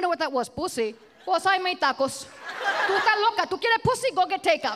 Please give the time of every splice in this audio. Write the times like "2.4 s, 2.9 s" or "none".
1.1 s, 2.9 s